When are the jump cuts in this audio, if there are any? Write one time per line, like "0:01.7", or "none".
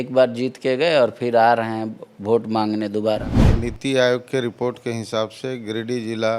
0:03.4